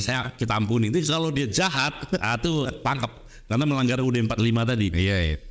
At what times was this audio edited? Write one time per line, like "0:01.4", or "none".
none